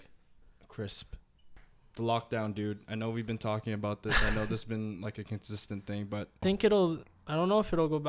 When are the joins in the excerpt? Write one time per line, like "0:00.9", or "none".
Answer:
0:01.5
0:06.4

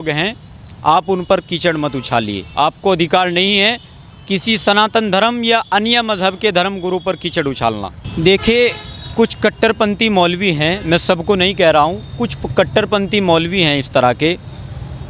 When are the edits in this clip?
0:07.9

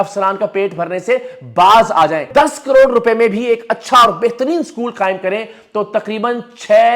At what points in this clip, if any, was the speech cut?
0:02.3

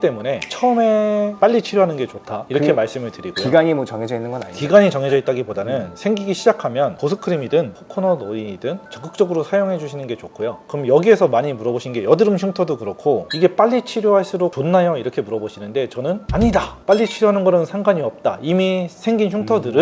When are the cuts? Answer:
0:08.8
0:10.6

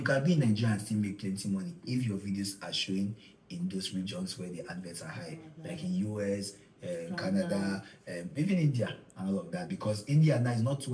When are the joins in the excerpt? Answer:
none

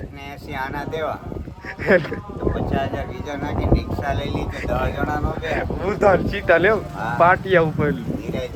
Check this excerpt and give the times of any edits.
none

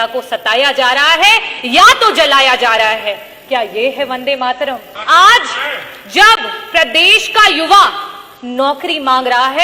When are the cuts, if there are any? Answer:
0:04.9

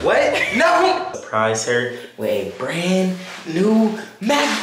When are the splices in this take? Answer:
0:01.1

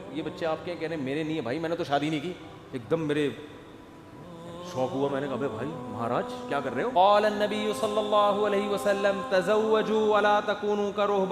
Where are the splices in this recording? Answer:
0:06.9

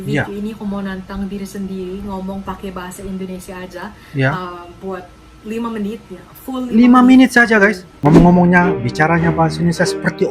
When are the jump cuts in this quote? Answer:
0:07.9

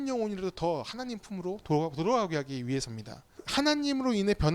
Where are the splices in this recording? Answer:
0:03.4

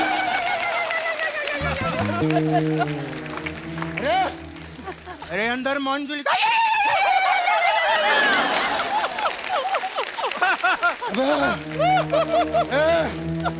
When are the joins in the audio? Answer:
none

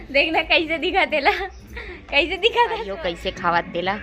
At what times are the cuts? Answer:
0:03.0

